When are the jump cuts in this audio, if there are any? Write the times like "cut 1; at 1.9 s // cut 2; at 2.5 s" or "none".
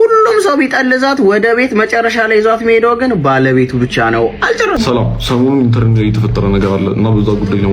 cut 1; at 4.8 s